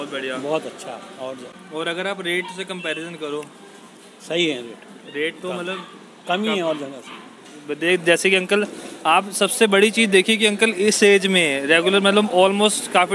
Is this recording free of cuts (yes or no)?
yes